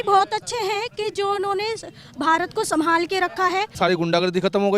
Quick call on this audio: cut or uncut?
cut